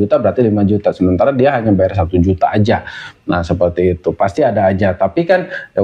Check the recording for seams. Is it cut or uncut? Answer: uncut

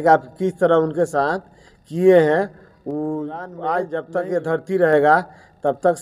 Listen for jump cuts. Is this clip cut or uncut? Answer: cut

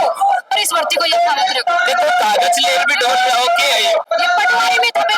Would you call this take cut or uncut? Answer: uncut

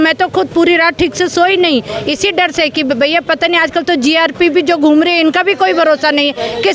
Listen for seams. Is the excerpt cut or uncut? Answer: uncut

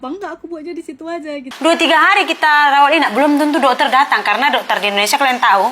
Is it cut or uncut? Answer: cut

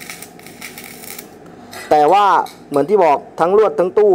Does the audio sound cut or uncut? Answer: uncut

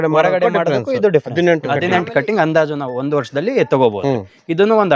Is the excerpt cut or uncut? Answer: cut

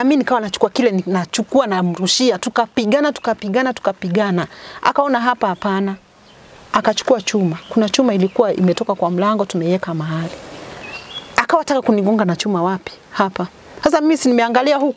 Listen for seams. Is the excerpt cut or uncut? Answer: uncut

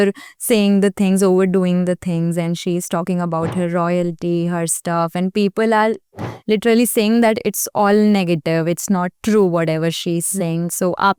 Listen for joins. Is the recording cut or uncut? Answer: uncut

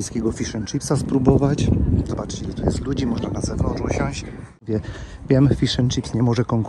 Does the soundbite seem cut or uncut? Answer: cut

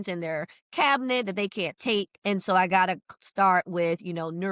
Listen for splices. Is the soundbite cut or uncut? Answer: cut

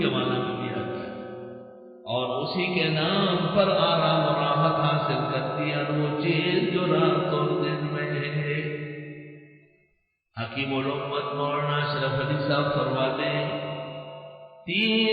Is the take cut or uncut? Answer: cut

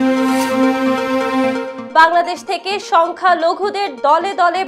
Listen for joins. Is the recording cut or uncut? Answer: cut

